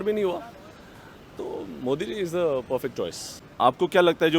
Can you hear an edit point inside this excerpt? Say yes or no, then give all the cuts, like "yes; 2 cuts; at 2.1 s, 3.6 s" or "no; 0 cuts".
yes; 1 cut; at 3.4 s